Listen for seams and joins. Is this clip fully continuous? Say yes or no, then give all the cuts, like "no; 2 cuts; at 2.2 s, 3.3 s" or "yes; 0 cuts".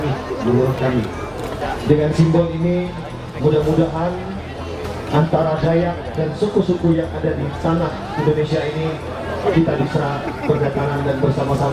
yes; 0 cuts